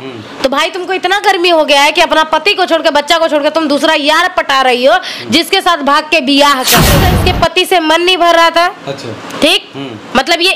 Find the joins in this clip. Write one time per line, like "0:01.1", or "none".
0:07.0